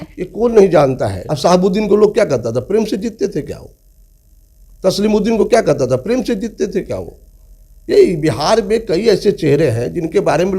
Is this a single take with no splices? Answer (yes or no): no